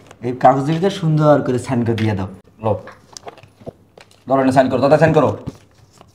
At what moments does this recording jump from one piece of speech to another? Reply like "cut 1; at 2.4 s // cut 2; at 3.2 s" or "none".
cut 1; at 2.4 s